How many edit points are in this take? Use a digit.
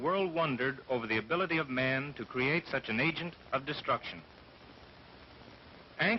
1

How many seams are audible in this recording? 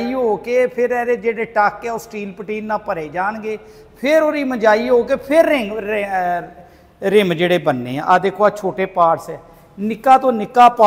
0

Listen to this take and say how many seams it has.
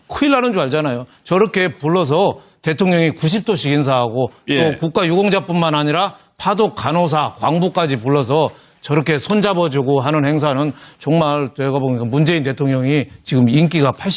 0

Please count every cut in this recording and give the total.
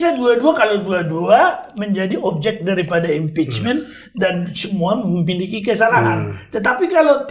0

